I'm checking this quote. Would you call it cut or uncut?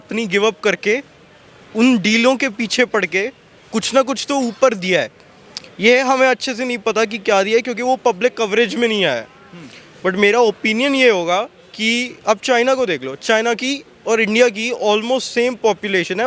uncut